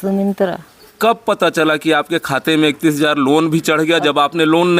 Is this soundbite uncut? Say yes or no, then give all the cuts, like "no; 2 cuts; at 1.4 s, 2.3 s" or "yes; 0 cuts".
no; 1 cut; at 0.9 s